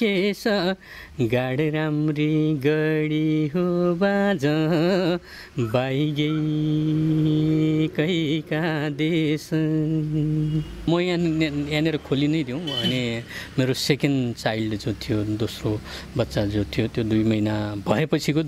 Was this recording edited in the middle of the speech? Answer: yes; 1 cut; at 10.9 s

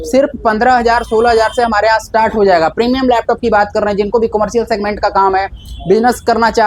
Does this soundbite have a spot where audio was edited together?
no; 0 cuts

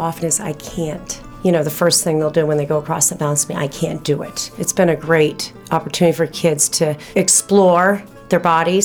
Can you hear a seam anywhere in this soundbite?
yes; 4 cuts; at 1.3 s, 4.6 s, 5.5 s, 7.0 s

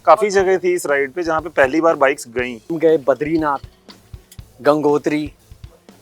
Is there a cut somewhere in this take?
yes; 1 cut; at 2.8 s

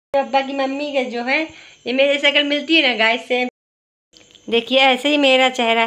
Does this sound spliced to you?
no; 0 cuts

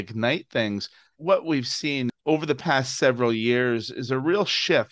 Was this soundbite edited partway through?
yes; 2 cuts; at 1.1 s, 2.2 s

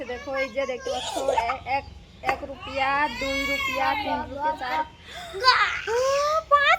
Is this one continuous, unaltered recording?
yes; 0 cuts

